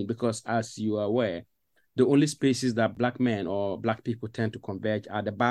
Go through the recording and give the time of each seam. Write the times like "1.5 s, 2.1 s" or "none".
2.9 s